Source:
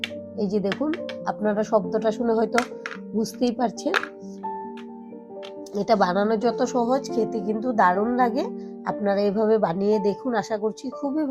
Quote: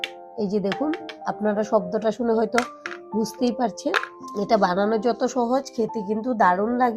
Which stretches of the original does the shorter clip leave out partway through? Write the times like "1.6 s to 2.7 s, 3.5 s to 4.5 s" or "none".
4.2 s to 5.6 s